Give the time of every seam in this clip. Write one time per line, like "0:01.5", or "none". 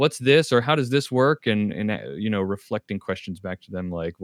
none